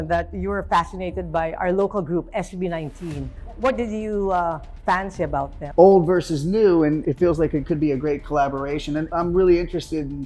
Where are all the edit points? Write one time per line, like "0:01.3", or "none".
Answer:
0:05.5
0:07.0
0:09.1